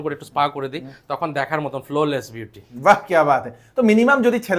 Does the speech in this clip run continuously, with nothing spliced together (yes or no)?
yes